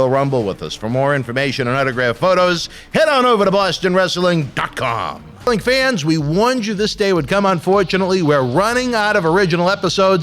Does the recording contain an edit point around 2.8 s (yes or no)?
no